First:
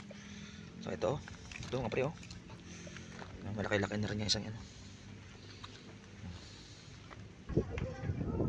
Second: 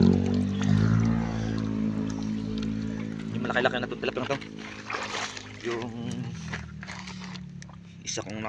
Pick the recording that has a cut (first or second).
first